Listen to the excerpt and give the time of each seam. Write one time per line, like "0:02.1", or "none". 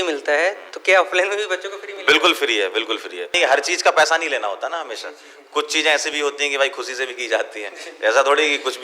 0:03.3